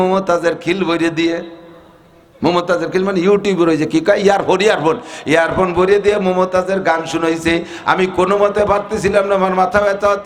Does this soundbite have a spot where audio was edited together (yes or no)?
no